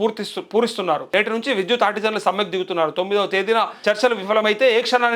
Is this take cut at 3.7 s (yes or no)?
yes